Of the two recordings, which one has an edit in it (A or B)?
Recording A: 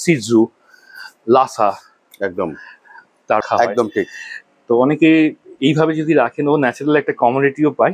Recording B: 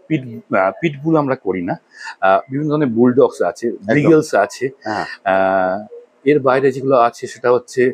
A